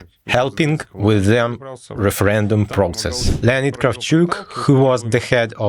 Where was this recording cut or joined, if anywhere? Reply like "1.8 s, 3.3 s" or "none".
3.3 s